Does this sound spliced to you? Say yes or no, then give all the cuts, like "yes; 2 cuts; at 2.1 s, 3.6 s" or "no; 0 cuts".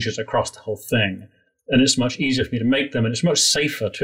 no; 0 cuts